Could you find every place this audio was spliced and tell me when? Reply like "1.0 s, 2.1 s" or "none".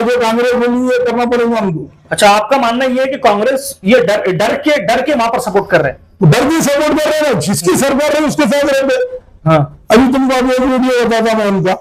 none

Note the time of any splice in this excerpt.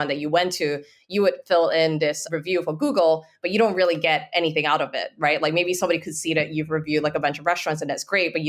2.2 s

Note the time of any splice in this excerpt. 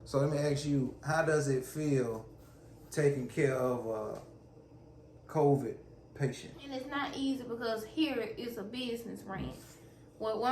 6.8 s

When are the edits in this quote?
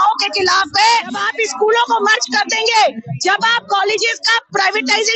1.2 s

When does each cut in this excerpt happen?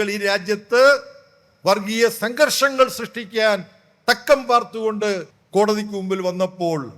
5.3 s

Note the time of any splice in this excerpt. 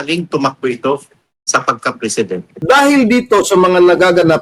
2.5 s

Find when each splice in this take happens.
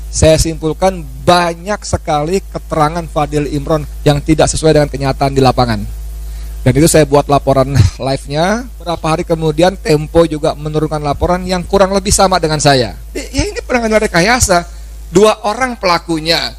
3.9 s, 9.0 s, 13.3 s

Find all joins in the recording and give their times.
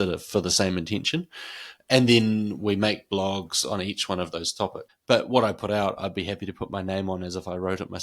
4.9 s

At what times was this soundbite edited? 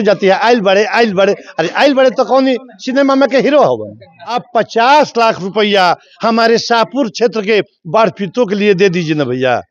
4.4 s

